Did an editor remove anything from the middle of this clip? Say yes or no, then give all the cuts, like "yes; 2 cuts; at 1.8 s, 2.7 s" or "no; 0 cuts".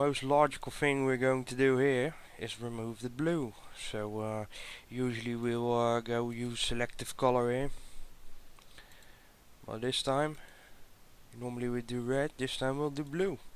no; 0 cuts